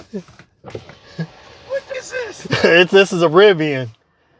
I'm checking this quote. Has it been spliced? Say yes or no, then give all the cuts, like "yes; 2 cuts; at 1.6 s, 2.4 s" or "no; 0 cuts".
yes; 1 cut; at 1.9 s